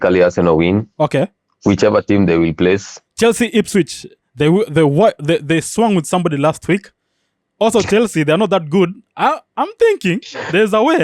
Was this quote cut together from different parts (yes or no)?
yes